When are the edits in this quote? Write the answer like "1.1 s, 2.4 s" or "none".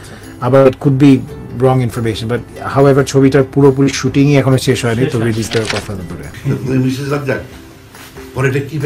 6.3 s